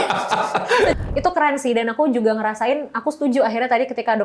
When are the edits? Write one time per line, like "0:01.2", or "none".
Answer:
0:00.9